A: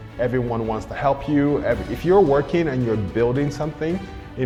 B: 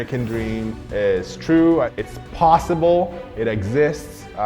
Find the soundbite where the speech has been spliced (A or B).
B